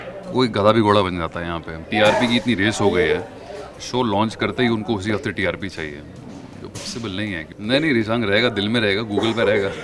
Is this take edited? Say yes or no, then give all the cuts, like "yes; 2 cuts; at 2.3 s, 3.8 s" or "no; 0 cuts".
yes; 2 cuts; at 1.8 s, 7.5 s